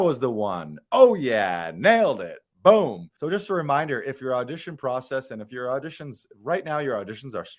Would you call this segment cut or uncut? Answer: cut